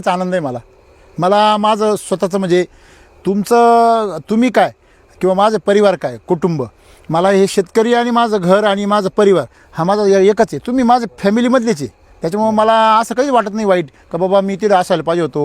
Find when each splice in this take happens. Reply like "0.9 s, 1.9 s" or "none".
none